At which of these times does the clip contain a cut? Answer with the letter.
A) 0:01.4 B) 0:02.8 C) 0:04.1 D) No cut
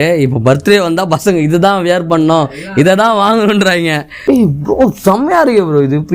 C